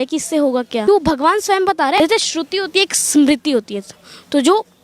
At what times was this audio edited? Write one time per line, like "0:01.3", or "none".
0:00.9
0:02.0